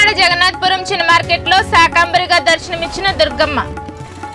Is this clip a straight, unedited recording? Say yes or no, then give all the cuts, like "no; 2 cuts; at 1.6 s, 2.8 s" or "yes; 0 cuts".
yes; 0 cuts